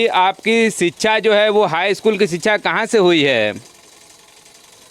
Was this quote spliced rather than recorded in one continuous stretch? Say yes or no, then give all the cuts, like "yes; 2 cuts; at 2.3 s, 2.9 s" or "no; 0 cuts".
no; 0 cuts